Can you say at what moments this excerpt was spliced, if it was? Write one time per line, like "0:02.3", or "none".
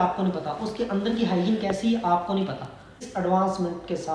0:03.0